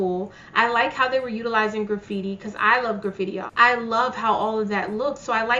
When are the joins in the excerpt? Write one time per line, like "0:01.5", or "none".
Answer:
0:03.5